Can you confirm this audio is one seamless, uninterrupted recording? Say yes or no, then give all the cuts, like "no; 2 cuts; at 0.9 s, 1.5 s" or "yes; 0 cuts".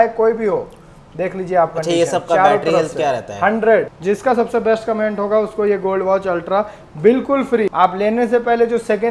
no; 2 cuts; at 3.9 s, 7.7 s